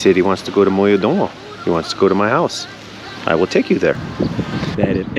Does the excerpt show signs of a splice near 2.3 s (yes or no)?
no